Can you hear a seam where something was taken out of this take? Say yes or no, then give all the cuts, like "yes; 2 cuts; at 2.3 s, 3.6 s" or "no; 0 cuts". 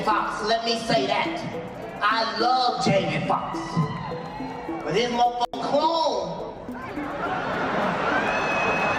no; 0 cuts